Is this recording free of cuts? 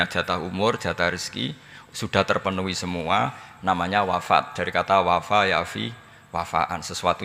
yes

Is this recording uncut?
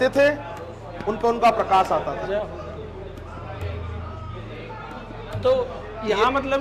yes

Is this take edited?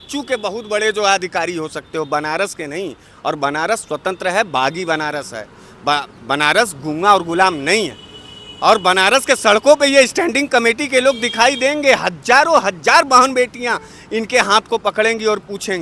no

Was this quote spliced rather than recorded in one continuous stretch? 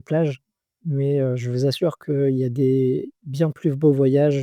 no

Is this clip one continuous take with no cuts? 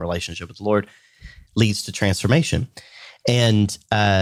yes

